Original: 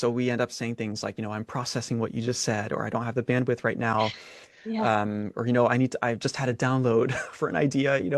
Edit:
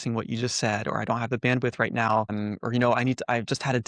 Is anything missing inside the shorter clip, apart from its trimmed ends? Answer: yes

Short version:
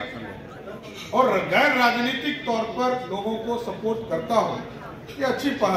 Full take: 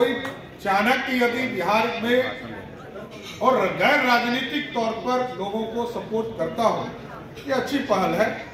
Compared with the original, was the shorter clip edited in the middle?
no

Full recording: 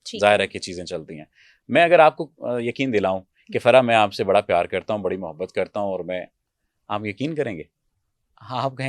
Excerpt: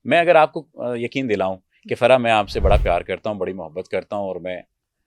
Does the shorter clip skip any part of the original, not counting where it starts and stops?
no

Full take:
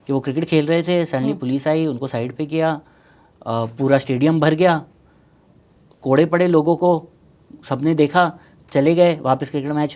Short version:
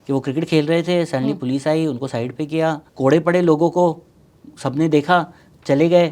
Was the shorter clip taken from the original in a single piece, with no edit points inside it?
no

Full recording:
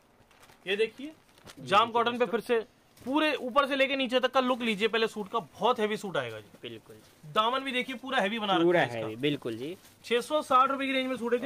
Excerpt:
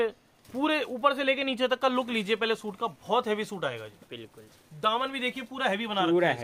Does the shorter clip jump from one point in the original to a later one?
no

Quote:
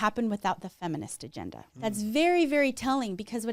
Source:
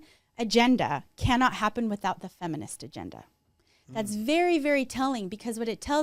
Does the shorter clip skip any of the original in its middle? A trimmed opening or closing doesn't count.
yes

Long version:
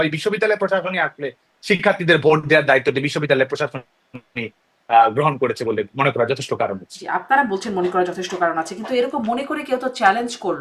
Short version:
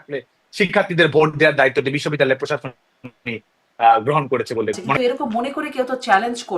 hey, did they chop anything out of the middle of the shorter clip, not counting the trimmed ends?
yes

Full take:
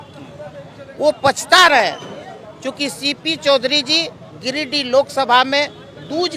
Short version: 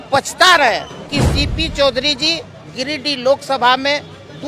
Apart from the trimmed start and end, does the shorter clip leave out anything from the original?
yes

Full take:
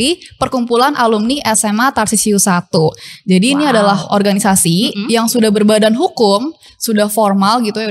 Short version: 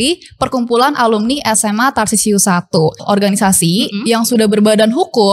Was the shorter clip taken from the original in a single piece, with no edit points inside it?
no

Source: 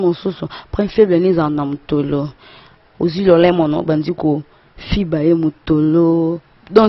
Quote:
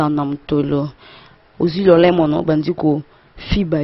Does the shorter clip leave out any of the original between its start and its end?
no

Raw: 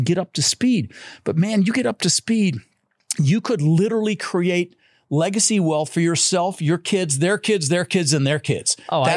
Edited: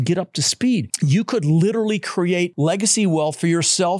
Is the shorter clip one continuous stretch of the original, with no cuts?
no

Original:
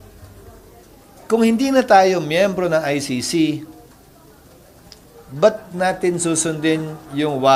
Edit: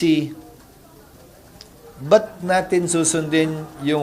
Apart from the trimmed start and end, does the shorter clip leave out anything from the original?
no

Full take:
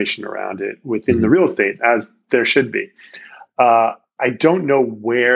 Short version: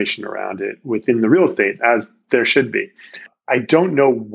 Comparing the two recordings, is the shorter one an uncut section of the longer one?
no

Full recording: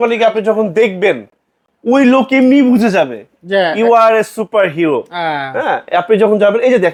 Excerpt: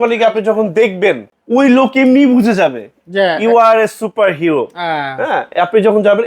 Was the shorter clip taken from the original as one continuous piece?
no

